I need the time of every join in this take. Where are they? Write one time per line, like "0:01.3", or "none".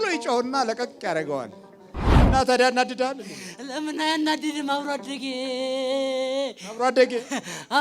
0:02.1